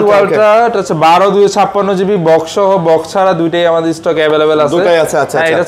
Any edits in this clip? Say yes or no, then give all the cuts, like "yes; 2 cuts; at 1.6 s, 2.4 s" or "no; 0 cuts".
no; 0 cuts